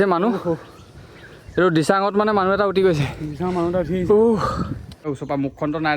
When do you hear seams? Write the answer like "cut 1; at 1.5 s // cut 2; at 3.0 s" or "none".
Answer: cut 1; at 4.9 s